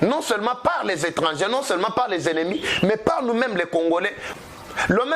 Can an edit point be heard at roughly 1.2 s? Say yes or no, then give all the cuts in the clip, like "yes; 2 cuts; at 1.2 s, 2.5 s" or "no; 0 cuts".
no; 1 cut; at 4.2 s